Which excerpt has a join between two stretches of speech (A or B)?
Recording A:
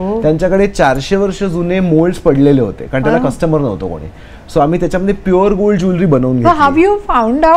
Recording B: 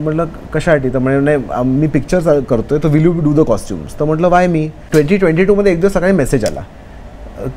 B